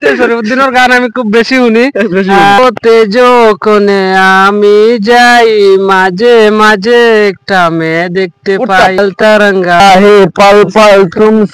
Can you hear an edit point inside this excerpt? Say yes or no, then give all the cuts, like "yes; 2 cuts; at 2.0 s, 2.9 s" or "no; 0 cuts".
yes; 2 cuts; at 2.6 s, 9.8 s